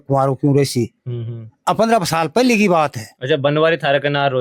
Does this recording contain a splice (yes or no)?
no